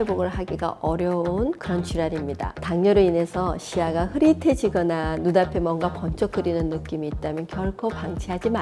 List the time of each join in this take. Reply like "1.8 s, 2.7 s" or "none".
2.5 s